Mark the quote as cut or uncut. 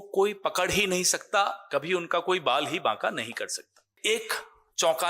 cut